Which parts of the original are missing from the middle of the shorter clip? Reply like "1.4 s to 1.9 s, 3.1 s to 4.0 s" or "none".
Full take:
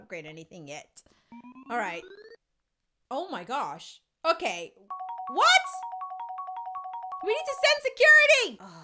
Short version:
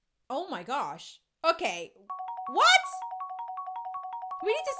none